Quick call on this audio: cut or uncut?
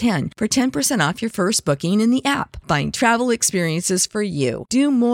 uncut